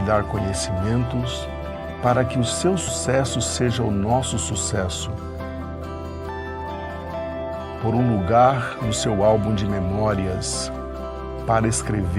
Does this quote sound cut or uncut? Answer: cut